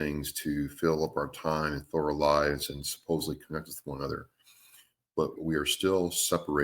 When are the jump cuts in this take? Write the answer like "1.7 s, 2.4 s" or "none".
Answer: 5.4 s